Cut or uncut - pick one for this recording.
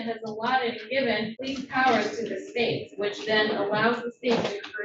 cut